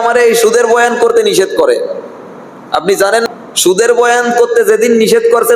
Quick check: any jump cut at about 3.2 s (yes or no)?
yes